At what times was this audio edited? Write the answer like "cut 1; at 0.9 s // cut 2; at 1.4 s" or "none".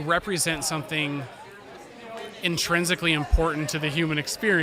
none